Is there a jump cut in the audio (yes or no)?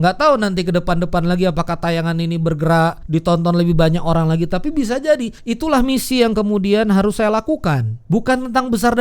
yes